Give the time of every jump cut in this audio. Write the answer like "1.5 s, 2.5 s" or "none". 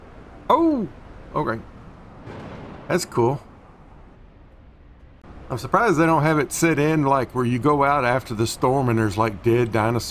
5.2 s